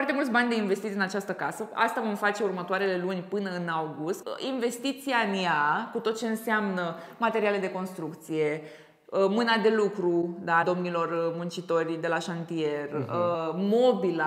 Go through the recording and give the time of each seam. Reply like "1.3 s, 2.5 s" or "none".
none